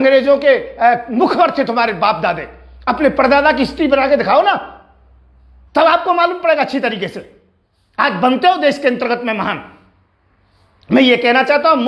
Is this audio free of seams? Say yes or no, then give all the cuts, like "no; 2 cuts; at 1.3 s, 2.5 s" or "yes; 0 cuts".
yes; 0 cuts